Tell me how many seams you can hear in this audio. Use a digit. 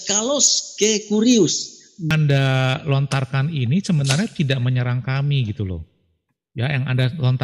1